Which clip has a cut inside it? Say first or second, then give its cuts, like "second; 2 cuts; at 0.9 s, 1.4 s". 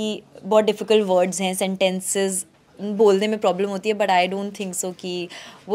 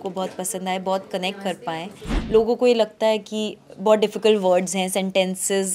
second; 1 cut; at 2.1 s